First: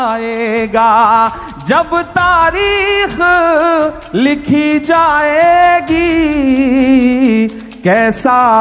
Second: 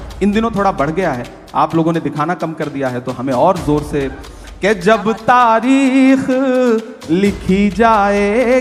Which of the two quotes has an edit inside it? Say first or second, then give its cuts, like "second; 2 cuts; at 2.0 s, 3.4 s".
second; 1 cut; at 4.3 s